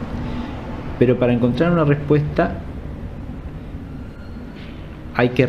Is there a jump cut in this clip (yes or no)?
no